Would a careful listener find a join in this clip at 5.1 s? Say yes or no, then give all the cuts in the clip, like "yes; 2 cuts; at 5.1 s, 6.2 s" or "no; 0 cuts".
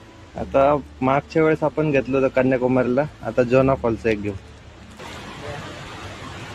yes; 1 cut; at 5.1 s